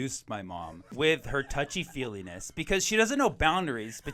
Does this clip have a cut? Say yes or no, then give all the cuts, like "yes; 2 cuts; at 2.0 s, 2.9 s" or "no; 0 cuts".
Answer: yes; 1 cut; at 0.9 s